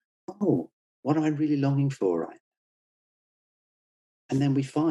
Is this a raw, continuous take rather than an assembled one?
yes; 0 cuts

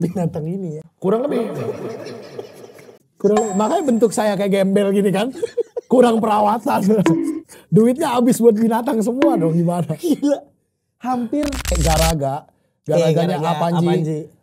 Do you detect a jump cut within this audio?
yes; 1 cut; at 11.7 s

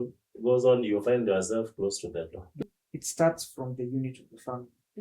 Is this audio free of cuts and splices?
no; 1 cut; at 2.6 s

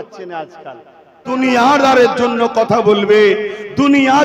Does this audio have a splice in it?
yes; 1 cut; at 1.3 s

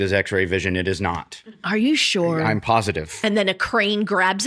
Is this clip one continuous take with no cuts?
no; 1 cut; at 3.1 s

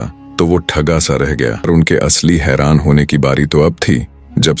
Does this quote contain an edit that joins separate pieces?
yes; 1 cut; at 1.7 s

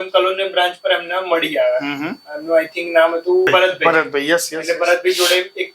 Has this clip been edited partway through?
yes; 1 cut; at 3.5 s

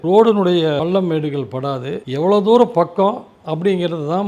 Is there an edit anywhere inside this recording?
yes; 2 cuts; at 0.8 s, 2.0 s

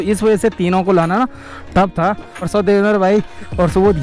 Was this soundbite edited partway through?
yes; 1 cut; at 2.5 s

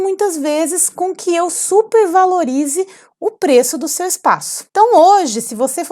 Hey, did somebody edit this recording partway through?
yes; 1 cut; at 4.6 s

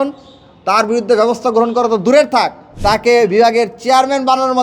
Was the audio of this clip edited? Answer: yes; 1 cut; at 2.6 s

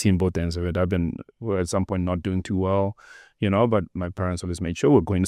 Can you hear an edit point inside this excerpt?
yes; 1 cut; at 1.3 s

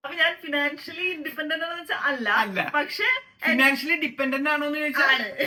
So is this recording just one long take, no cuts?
yes; 0 cuts

